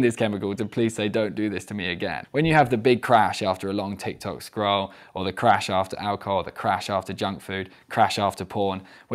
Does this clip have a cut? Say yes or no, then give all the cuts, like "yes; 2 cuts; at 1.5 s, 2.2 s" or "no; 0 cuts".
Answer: yes; 1 cut; at 2.2 s